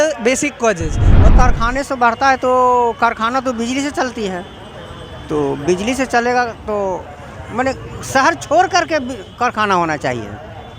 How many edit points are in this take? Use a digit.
1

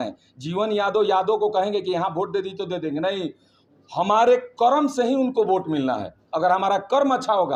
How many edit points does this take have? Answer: 0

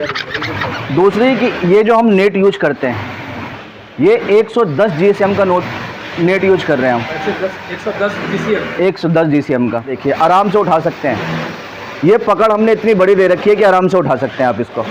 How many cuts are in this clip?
1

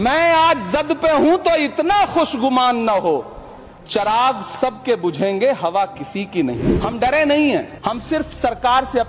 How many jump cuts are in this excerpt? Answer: 2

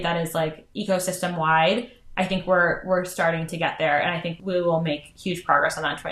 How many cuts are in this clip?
1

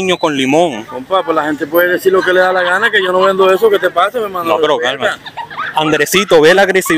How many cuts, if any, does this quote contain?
0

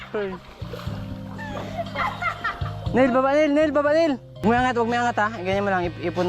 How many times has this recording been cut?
1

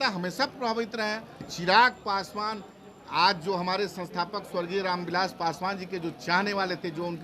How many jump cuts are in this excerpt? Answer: 1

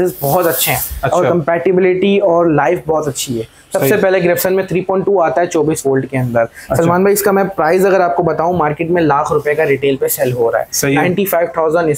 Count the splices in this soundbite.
0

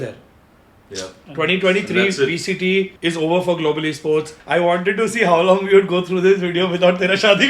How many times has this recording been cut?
2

